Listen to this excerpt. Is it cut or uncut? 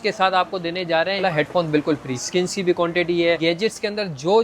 cut